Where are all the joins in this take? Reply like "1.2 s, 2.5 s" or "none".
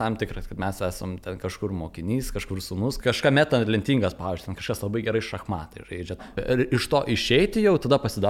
3.0 s, 6.3 s